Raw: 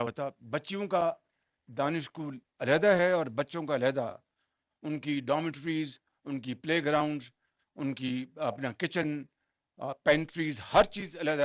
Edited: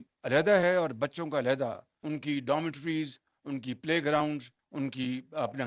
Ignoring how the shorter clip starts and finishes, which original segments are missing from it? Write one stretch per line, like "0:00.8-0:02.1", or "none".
0:04.3-0:04.7
0:07.4-0:07.6